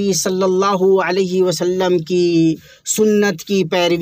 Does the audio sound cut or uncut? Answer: uncut